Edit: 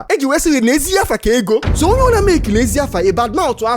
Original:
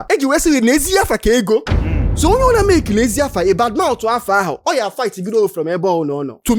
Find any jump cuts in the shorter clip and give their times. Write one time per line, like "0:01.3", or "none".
0:01.7